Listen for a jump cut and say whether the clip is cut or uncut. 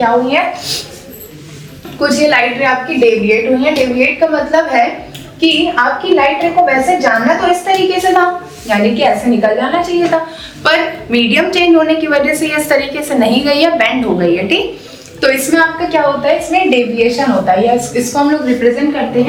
uncut